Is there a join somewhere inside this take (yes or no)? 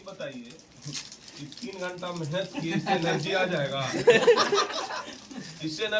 no